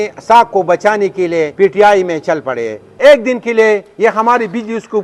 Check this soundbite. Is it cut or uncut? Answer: cut